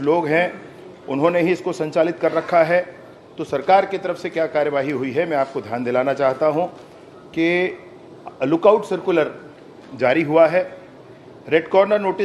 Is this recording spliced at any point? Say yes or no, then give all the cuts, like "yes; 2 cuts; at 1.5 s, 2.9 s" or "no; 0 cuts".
no; 0 cuts